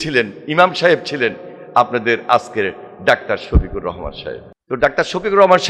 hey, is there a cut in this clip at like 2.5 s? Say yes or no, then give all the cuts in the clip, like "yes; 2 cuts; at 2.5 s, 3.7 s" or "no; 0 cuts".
no; 1 cut; at 4.5 s